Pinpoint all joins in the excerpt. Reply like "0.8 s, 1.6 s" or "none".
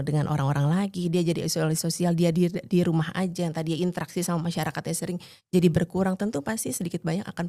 none